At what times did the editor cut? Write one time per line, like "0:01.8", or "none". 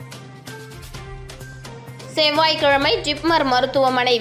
0:01.1